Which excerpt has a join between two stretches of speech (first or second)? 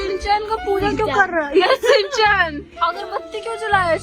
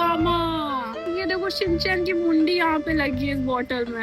second